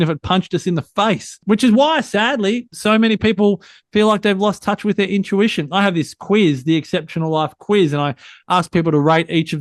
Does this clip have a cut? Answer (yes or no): yes